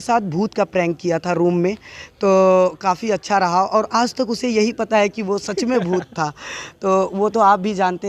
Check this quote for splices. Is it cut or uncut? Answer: uncut